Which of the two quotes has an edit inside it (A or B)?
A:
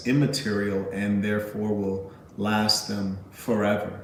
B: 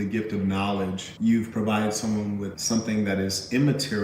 B